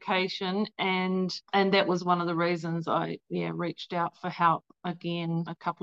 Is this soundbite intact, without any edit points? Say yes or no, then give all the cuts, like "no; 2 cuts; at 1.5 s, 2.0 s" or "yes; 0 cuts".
yes; 0 cuts